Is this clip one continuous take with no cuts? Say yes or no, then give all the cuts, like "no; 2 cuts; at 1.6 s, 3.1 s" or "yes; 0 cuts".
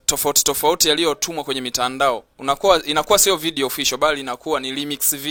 yes; 0 cuts